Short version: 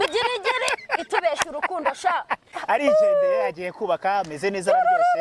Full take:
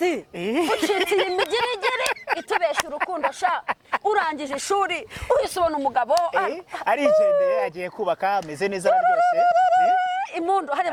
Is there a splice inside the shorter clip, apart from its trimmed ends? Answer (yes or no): yes